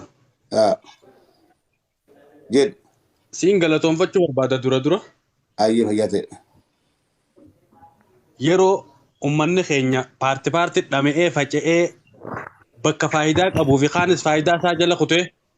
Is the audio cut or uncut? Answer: uncut